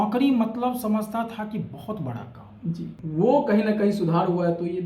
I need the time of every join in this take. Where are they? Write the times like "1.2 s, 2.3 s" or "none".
2.9 s